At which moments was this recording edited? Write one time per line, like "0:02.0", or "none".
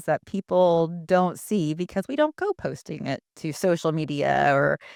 none

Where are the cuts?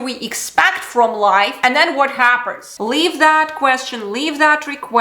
0:02.7

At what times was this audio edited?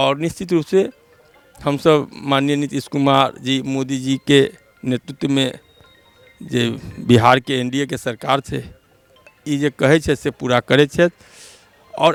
none

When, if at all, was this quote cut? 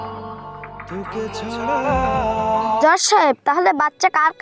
0:02.8

